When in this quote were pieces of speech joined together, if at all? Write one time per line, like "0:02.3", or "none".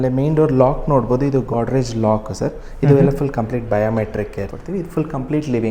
0:04.5